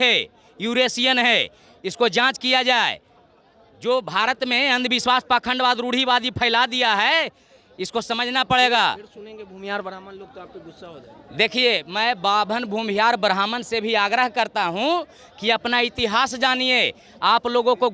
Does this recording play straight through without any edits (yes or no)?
yes